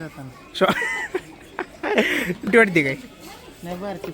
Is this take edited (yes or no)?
yes